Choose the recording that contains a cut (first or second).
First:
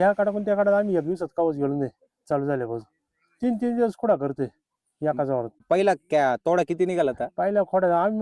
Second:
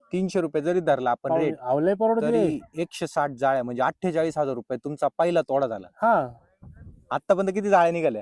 first